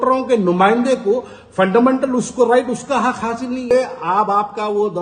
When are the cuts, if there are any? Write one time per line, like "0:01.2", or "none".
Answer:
0:03.7